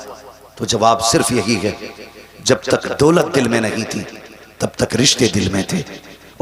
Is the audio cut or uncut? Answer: uncut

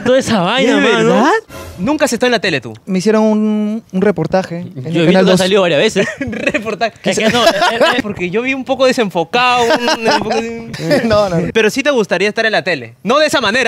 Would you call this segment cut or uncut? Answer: cut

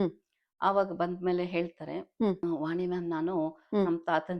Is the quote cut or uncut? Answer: cut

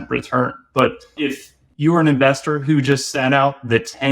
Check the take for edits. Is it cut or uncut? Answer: cut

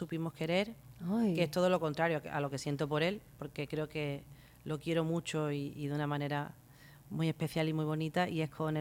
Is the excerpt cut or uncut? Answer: uncut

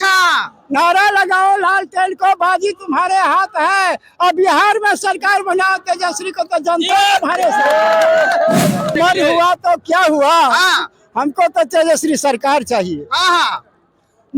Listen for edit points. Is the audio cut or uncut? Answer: cut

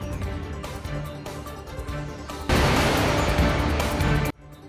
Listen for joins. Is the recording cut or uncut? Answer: uncut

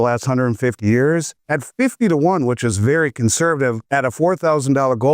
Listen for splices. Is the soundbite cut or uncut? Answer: uncut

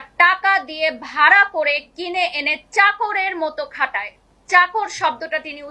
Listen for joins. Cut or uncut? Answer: uncut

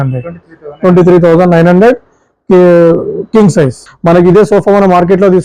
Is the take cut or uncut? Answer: cut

